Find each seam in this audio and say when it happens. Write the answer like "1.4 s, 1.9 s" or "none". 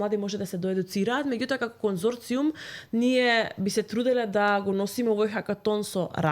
none